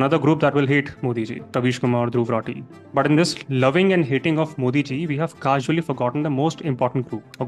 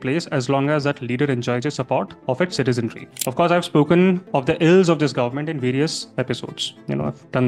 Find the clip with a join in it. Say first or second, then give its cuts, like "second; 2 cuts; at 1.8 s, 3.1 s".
second; 1 cut; at 3.1 s